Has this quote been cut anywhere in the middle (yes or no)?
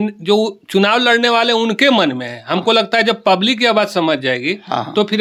no